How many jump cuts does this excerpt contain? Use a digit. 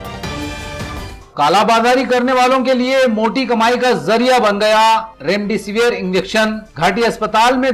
0